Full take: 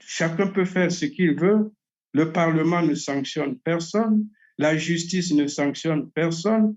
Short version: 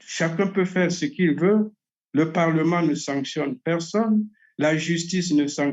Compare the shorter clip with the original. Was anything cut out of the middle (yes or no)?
no